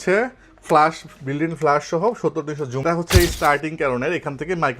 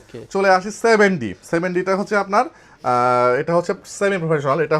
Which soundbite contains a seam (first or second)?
first